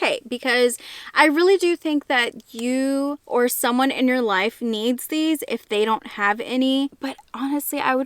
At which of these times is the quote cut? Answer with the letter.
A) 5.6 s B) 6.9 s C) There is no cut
B